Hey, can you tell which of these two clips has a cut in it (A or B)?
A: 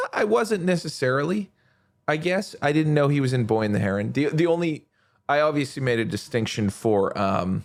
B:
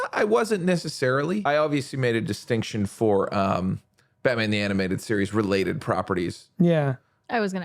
B